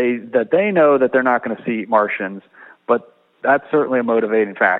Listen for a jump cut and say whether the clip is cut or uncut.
uncut